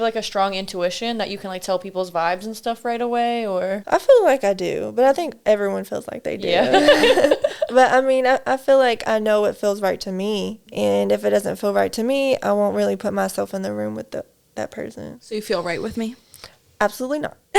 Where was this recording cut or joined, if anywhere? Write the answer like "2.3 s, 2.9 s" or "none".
3.8 s, 10.6 s, 15.1 s